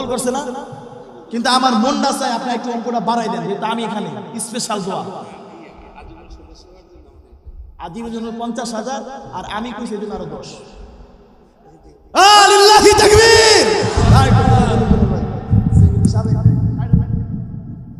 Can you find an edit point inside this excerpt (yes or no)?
no